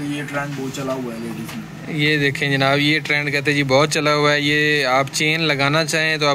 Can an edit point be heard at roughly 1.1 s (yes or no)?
no